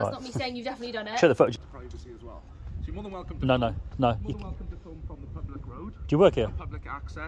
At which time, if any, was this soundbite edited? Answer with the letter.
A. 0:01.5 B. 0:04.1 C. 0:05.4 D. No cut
A